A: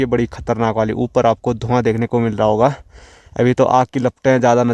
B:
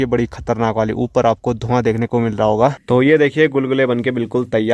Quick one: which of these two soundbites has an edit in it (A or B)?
B